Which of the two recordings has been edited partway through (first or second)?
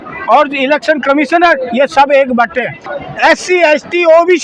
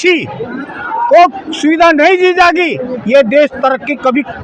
first